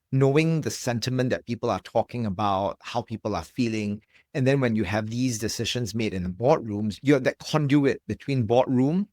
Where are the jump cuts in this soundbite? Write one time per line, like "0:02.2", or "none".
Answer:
0:06.9